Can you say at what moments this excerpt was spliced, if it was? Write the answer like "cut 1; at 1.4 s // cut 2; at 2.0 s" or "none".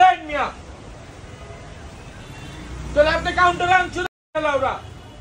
none